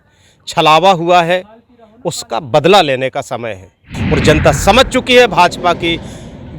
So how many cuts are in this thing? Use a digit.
1